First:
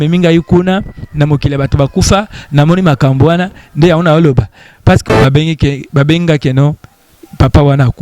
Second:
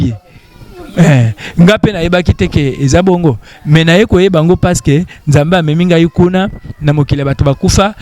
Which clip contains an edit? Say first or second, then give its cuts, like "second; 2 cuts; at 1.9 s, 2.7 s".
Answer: first; 1 cut; at 5.0 s